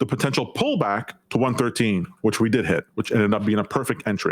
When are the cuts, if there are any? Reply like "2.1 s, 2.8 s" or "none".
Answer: 2.9 s